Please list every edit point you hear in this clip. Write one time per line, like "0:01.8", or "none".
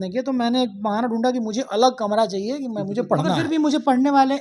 0:03.4